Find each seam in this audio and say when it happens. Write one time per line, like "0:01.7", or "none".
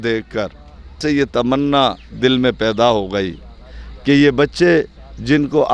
0:01.0